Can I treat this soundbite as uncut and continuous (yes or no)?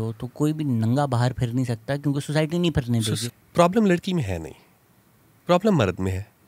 no